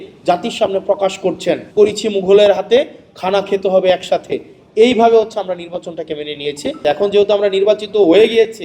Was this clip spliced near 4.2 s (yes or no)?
no